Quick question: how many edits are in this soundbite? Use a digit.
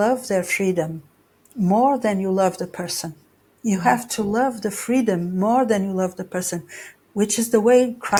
0